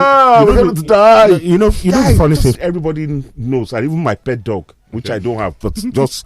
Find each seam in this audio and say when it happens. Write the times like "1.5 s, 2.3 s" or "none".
2.6 s